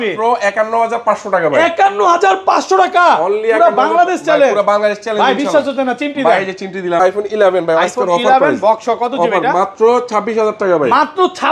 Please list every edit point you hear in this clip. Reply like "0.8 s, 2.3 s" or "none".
7.0 s